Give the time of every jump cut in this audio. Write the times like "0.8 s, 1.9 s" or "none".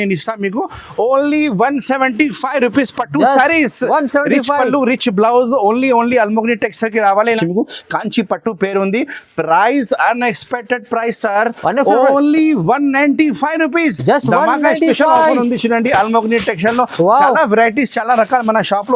7.4 s